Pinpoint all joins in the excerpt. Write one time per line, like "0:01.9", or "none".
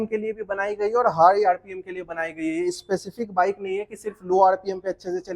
none